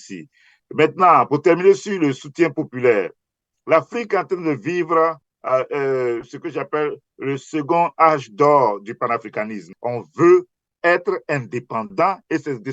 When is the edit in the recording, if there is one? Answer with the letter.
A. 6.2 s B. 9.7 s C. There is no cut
B